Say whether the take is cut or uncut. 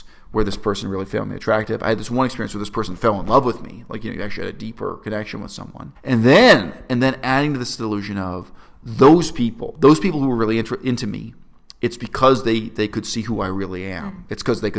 uncut